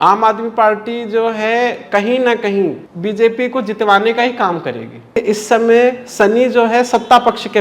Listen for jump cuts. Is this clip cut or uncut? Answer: cut